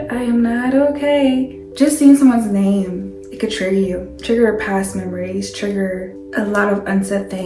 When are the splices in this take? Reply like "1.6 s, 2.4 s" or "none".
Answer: 1.6 s, 6.2 s